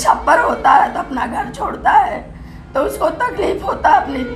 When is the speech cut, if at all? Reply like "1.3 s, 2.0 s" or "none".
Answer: none